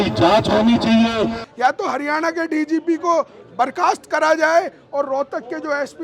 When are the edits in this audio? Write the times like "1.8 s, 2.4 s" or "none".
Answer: 1.4 s